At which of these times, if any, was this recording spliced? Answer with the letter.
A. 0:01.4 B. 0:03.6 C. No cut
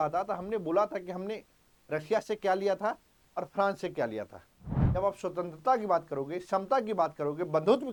C